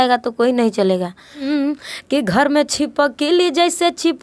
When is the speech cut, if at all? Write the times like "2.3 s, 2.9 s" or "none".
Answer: 1.4 s